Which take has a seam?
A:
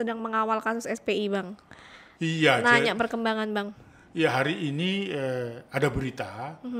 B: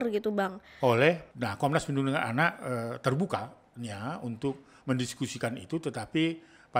B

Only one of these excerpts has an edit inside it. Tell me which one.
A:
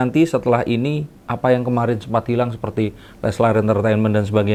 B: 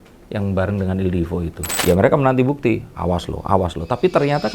B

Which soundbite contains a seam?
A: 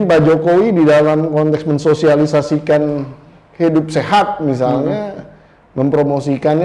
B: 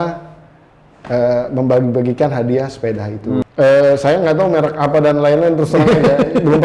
B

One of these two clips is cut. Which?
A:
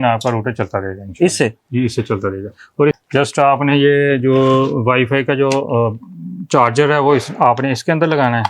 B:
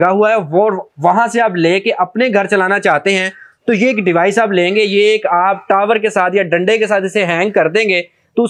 A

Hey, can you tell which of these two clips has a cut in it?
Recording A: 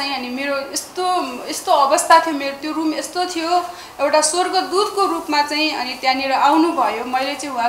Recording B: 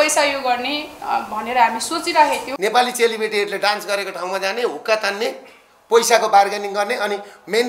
B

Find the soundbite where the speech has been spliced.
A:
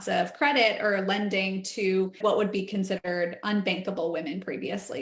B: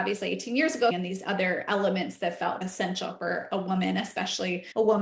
B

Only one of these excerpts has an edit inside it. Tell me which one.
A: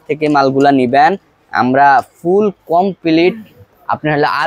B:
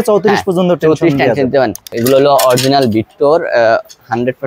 B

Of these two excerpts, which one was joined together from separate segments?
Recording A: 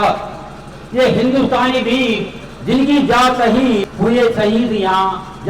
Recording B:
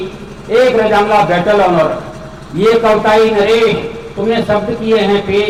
A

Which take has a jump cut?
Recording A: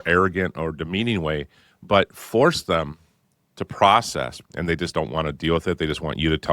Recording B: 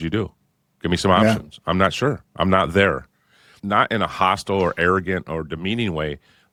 A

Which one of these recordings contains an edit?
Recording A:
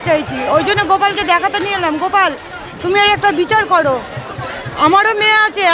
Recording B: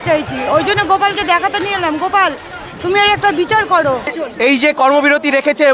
B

